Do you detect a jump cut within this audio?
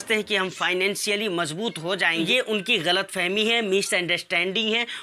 yes; 1 cut; at 2.3 s

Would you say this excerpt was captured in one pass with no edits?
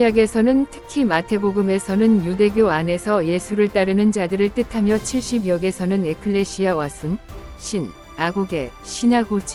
yes; 0 cuts

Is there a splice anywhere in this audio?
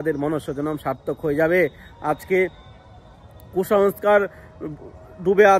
no; 0 cuts

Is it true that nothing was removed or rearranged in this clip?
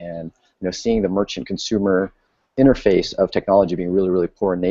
no; 1 cut; at 1.2 s

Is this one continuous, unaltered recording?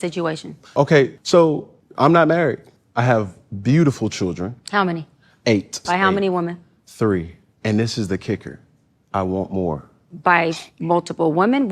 no; 1 cut; at 5.7 s

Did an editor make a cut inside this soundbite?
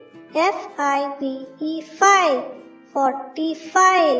no; 0 cuts

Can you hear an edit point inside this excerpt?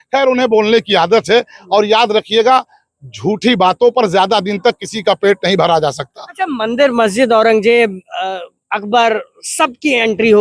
no; 0 cuts

